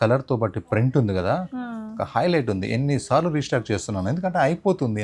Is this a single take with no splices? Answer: yes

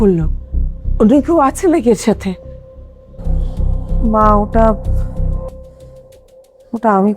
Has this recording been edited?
yes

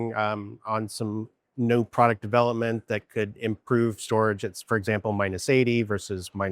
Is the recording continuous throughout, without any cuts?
yes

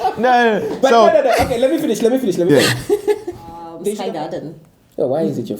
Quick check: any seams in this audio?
yes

